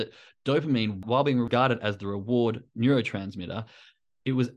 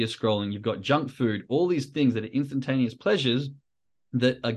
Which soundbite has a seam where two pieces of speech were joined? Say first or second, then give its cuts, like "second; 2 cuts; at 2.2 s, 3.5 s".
first; 1 cut; at 1.0 s